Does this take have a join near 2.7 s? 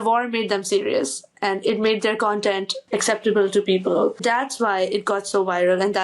yes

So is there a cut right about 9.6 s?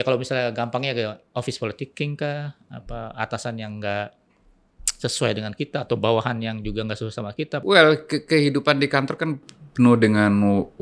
no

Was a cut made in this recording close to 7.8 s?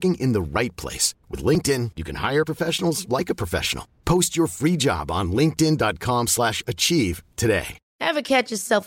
yes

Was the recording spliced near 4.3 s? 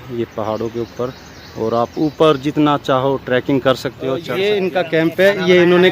yes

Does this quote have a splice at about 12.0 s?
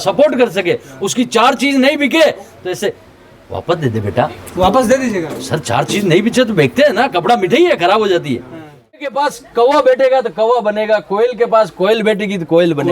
no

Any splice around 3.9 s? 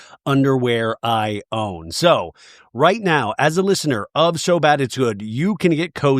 no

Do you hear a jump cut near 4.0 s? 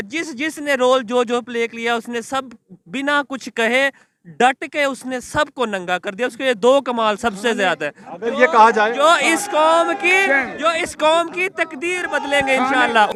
no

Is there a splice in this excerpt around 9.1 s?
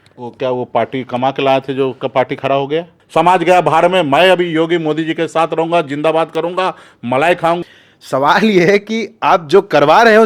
no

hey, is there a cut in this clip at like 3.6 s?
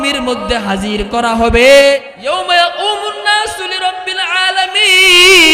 no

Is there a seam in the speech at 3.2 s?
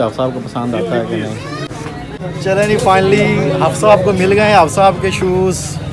no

